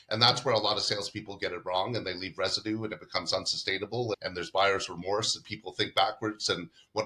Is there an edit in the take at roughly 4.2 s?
yes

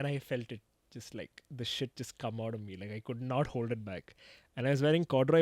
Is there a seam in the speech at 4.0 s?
no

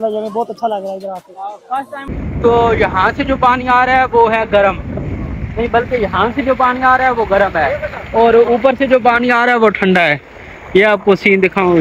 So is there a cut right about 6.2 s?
no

